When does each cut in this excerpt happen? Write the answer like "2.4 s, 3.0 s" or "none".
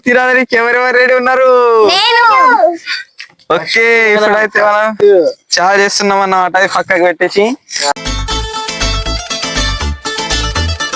none

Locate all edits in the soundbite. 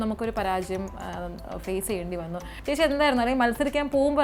2.6 s

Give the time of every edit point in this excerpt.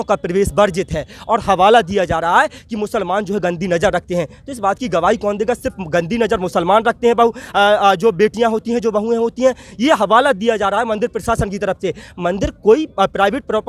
none

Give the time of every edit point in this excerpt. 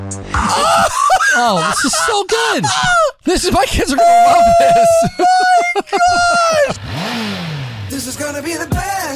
6.8 s

